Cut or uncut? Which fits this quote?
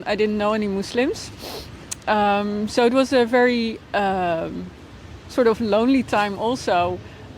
uncut